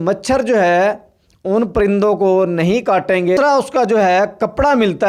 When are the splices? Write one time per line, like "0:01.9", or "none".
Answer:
0:03.4

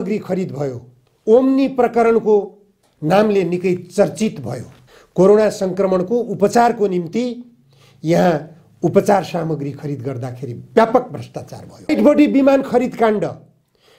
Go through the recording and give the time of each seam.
0:11.9

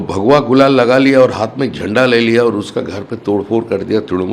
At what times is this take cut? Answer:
none

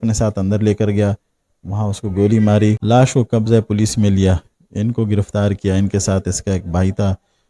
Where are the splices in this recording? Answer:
0:02.8

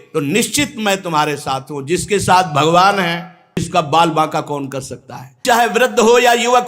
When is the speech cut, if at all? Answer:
0:03.7
0:05.4

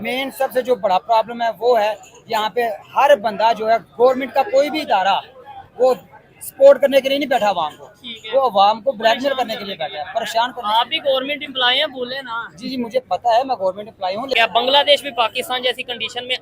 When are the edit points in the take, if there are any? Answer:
0:14.3

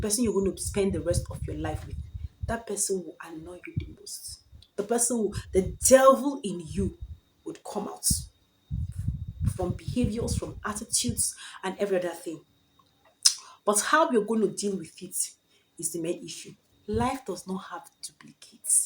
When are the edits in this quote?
0:16.7

